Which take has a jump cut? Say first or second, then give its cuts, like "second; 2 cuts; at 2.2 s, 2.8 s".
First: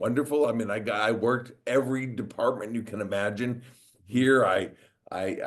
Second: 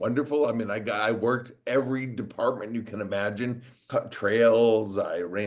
second; 1 cut; at 3.8 s